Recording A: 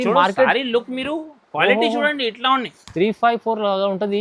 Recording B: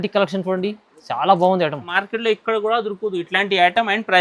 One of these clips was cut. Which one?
B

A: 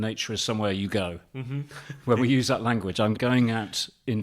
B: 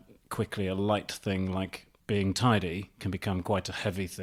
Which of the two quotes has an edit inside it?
A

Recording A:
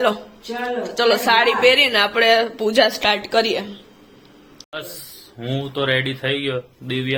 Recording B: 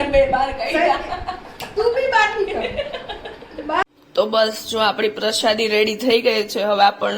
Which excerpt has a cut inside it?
B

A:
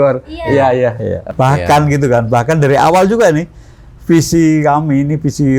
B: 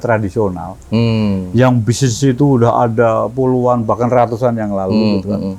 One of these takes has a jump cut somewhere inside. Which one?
A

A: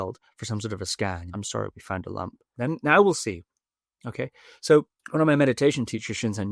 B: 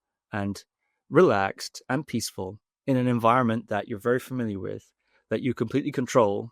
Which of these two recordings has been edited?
A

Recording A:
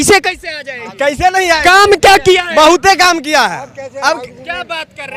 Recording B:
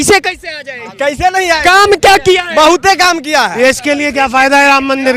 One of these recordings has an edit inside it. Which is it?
B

